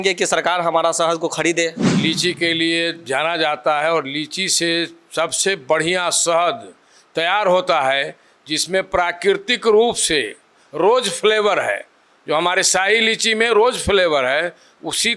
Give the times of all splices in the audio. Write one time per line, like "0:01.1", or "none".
0:01.9